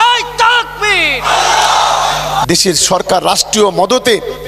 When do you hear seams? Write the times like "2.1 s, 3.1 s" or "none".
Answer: 2.4 s